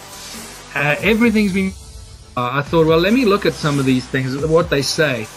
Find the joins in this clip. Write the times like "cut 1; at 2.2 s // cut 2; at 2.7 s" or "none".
none